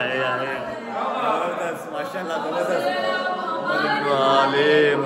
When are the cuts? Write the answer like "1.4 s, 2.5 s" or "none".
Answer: none